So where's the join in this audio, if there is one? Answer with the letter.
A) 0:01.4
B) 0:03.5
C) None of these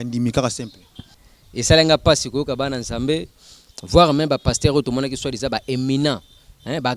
A